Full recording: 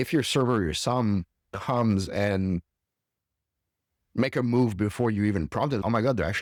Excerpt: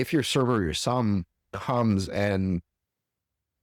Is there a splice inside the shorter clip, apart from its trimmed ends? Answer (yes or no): no